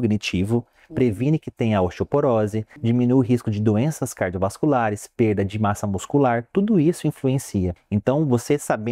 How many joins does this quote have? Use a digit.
2